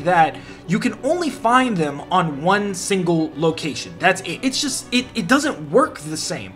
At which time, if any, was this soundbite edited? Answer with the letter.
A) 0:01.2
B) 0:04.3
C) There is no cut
B